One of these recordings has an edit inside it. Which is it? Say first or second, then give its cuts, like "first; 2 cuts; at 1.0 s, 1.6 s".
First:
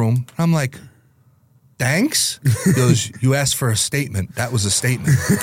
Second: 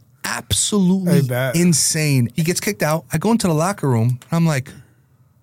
second; 1 cut; at 2.3 s